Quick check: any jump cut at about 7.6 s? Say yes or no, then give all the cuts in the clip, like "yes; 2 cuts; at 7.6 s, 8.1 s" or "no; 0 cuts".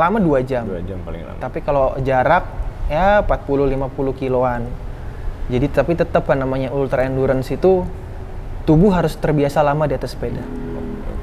no; 0 cuts